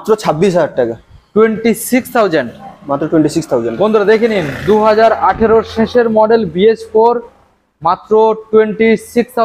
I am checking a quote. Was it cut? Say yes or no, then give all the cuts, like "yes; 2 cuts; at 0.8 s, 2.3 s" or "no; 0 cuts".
no; 0 cuts